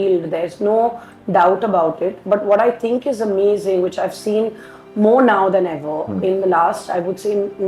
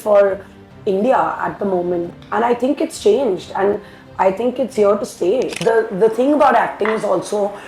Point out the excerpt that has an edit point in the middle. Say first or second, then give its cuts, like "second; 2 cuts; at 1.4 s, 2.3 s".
second; 2 cuts; at 2.1 s, 5.6 s